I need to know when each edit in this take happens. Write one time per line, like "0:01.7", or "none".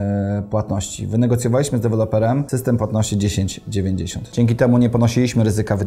0:02.5
0:04.2